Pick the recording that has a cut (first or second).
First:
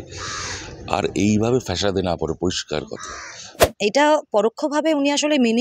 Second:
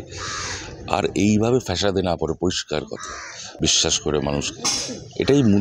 first